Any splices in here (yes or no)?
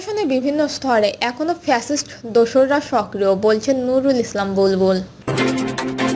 yes